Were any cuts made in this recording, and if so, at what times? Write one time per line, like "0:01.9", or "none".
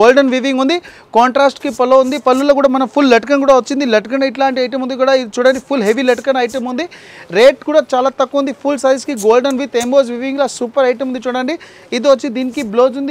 none